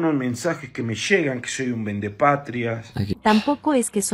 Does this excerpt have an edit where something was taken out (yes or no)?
yes